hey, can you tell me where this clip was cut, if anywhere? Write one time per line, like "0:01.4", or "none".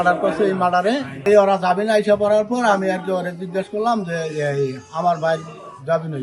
0:01.3